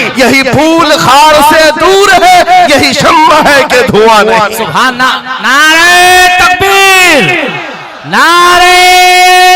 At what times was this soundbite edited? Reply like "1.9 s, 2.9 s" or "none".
none